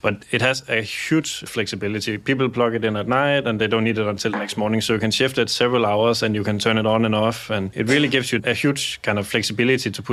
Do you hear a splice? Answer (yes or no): no